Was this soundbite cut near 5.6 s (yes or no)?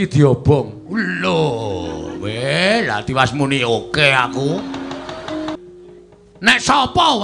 yes